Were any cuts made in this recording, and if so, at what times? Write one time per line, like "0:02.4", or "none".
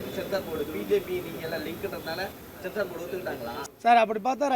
0:03.6